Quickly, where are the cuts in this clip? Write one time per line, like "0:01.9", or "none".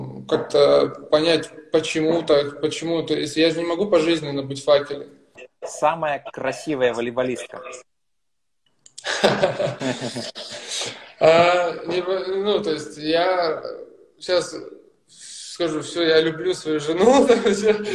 0:05.4

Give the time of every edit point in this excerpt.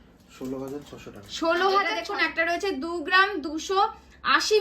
0:02.0

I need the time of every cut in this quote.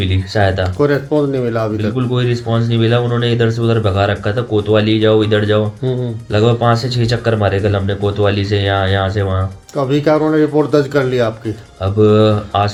none

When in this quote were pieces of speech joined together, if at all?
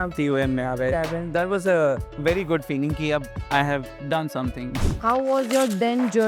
0:02.1
0:03.4
0:04.7

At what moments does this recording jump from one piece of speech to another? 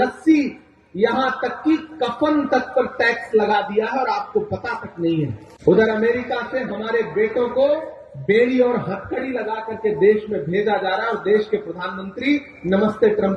0:05.5

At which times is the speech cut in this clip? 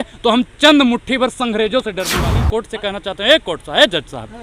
0:02.2

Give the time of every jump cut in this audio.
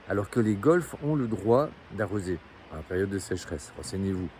none

